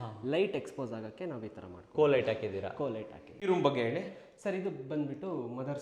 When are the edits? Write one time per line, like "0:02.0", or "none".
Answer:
0:03.4